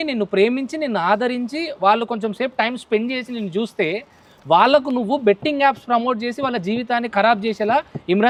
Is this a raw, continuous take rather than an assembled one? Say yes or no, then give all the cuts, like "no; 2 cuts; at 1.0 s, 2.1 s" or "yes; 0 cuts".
yes; 0 cuts